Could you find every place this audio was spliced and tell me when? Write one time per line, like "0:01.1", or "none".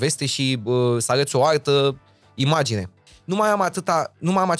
0:03.0